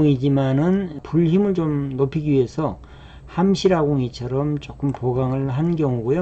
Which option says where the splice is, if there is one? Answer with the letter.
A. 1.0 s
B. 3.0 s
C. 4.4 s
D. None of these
A